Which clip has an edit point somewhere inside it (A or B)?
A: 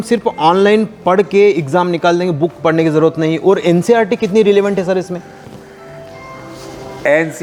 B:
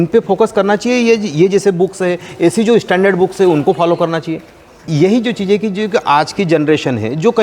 B